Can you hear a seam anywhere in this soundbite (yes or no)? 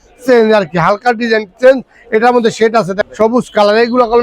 yes